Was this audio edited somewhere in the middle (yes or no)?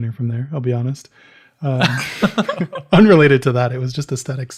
no